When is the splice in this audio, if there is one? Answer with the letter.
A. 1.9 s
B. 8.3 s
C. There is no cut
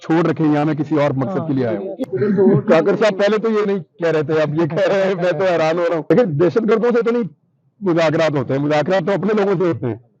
A